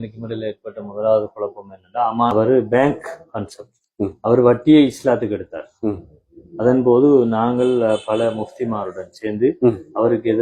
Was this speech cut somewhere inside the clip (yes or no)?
yes